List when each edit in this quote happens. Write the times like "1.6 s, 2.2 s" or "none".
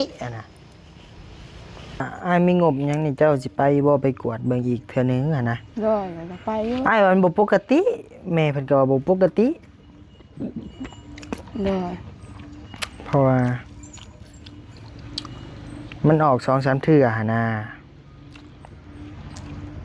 2.1 s